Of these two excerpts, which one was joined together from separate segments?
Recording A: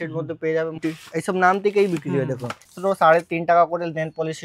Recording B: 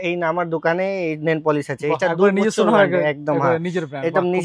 A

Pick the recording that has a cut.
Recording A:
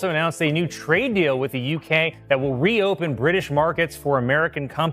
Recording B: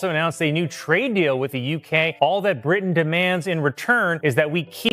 B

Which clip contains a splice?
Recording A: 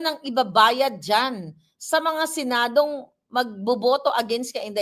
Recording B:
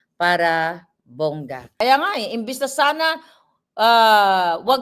B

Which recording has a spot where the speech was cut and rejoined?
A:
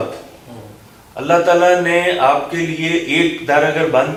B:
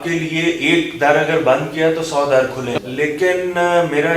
B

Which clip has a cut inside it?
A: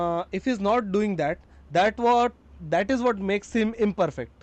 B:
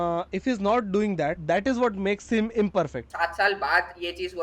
B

